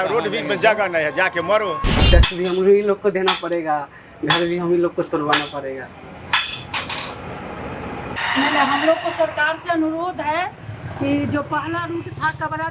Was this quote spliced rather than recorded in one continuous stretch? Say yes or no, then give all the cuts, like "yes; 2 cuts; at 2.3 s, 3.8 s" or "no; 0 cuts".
yes; 2 cuts; at 2.0 s, 8.1 s